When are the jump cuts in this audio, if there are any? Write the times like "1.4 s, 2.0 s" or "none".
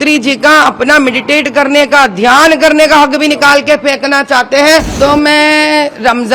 4.9 s

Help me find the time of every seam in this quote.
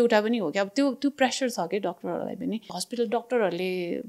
2.8 s

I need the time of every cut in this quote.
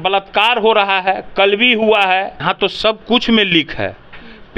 2.4 s

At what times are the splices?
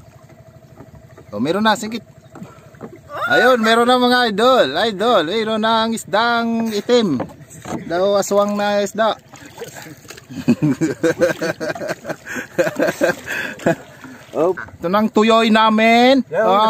14.7 s

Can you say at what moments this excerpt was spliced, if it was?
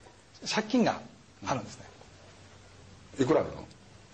2.8 s

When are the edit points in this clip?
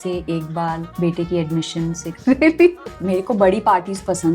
0.9 s, 2.1 s, 2.9 s

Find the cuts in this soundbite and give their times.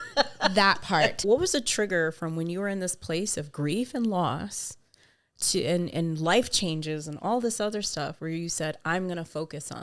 1.2 s

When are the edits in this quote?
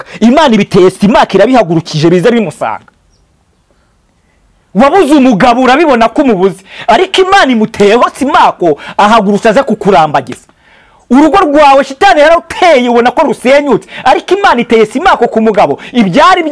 none

